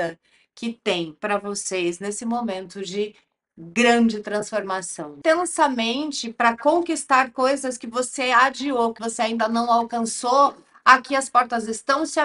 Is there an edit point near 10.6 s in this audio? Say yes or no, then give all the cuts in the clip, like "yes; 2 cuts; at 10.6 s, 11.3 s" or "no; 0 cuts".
no; 2 cuts; at 5.2 s, 9.0 s